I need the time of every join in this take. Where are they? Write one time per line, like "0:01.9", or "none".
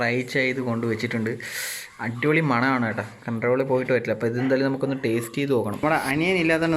0:05.8